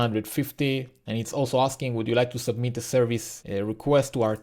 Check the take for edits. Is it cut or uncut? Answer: cut